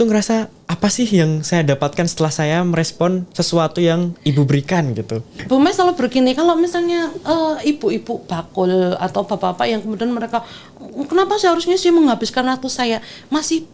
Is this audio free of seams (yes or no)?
no